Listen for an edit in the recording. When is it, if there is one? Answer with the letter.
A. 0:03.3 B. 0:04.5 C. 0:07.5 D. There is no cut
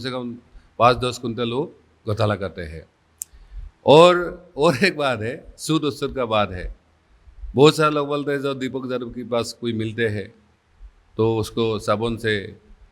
D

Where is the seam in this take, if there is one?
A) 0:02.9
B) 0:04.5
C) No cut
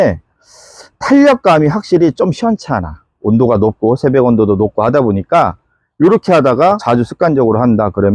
C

